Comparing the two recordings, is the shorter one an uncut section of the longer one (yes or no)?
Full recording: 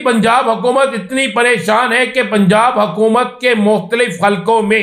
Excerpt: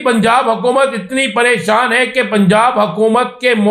yes